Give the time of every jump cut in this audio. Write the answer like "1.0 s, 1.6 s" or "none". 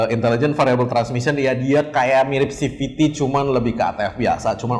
none